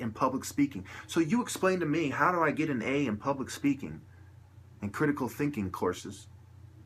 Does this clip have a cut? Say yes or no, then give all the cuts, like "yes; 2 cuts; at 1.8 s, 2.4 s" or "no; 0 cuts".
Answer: yes; 1 cut; at 5.3 s